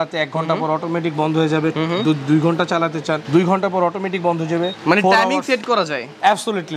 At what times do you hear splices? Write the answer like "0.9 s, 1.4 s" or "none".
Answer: 3.2 s, 4.8 s